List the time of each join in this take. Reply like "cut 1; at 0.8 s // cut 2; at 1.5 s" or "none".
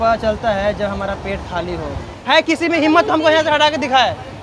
cut 1; at 2.1 s